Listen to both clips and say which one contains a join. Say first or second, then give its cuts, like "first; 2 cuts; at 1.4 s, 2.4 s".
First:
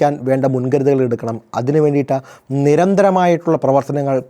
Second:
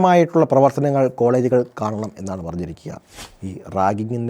second; 1 cut; at 3.1 s